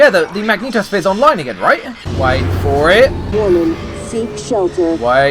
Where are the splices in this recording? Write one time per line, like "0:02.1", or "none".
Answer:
0:02.0
0:03.2